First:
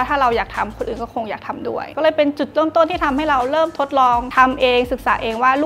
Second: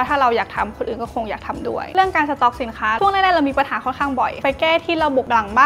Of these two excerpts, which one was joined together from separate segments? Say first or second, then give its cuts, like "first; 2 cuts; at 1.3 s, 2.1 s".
second; 2 cuts; at 1.9 s, 4.4 s